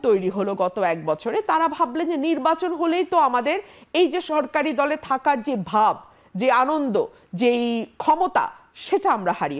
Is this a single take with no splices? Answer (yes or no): yes